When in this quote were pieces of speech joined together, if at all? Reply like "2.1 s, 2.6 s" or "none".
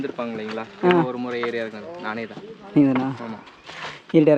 none